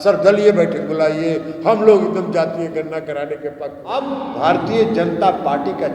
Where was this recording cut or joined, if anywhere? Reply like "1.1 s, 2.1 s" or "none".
4.0 s